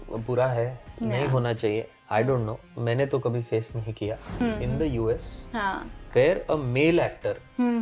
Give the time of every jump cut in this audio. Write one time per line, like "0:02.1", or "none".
0:04.3